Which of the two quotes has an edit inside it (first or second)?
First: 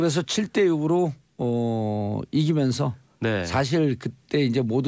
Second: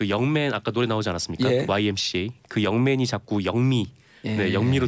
first